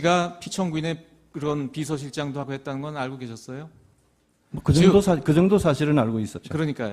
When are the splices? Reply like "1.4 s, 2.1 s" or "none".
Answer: 3.9 s